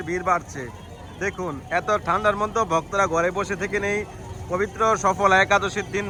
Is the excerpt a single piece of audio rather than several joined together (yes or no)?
yes